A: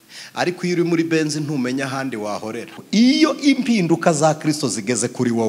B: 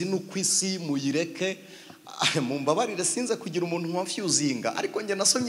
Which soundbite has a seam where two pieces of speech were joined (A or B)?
A